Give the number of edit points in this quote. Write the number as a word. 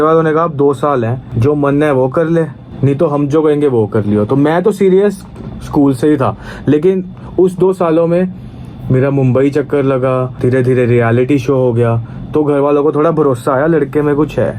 three